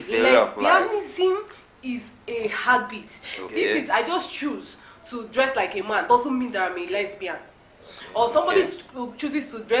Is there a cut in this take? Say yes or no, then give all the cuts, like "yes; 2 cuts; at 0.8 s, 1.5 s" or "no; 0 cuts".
no; 0 cuts